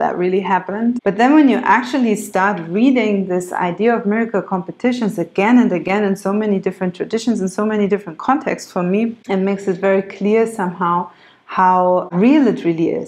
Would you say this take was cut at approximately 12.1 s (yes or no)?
yes